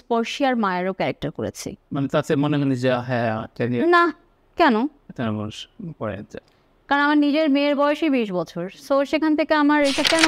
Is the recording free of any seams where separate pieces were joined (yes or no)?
yes